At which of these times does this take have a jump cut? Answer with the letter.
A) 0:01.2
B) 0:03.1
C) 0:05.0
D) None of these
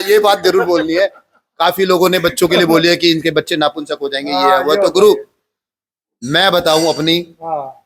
D